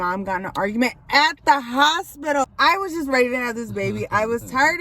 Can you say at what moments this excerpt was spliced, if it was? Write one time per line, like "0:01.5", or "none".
0:02.5